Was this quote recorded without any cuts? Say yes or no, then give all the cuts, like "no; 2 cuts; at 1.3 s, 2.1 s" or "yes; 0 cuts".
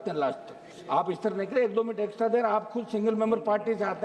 yes; 0 cuts